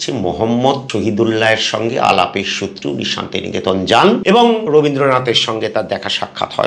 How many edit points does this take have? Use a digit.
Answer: 2